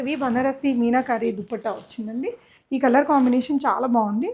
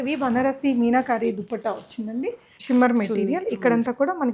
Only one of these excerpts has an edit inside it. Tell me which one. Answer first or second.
second